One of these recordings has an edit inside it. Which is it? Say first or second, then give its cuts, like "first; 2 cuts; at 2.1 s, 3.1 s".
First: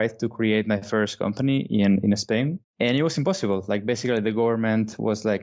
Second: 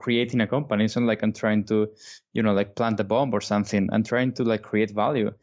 first; 1 cut; at 2.6 s